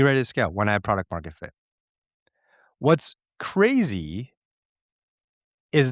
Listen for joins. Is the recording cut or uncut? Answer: uncut